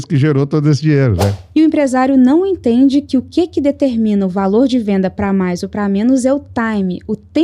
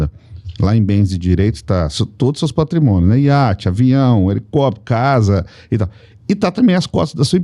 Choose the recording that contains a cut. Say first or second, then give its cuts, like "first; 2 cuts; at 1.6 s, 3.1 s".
first; 1 cut; at 1.4 s